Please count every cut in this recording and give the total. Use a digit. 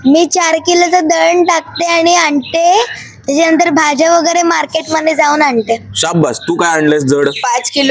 0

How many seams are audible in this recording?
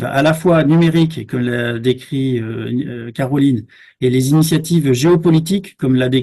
0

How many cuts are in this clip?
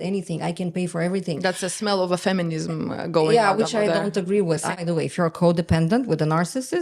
1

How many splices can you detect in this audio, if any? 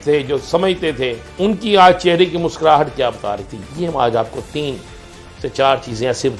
1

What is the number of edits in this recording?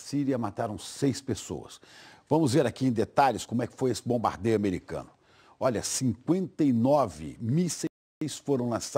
0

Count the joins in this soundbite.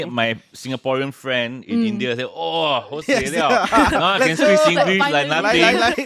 0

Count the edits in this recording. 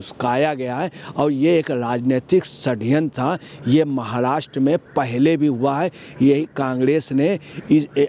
0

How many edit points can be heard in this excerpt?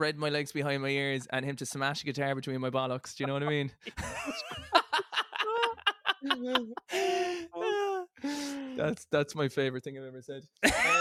0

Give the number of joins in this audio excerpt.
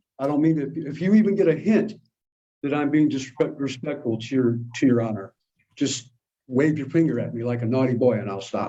0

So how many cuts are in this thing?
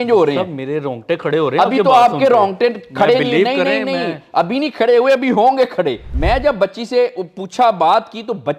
1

